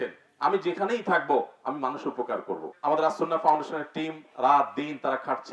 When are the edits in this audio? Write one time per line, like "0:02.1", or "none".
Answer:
0:02.7